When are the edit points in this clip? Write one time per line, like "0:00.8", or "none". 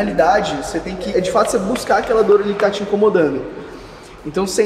0:01.1